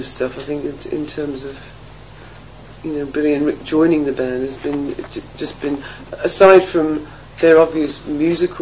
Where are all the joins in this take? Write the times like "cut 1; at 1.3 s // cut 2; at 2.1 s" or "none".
none